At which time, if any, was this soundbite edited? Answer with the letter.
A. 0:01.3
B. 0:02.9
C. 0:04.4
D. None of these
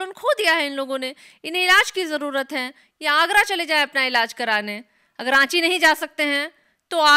D